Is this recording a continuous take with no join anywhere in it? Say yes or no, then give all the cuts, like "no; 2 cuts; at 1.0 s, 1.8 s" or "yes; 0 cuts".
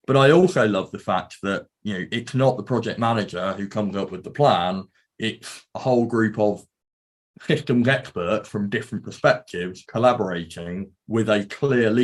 yes; 0 cuts